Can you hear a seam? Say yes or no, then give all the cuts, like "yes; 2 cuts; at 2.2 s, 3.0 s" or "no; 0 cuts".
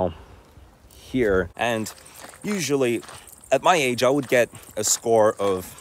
yes; 1 cut; at 1.5 s